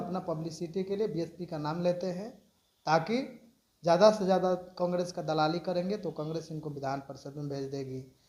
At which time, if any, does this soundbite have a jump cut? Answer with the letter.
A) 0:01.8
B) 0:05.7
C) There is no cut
C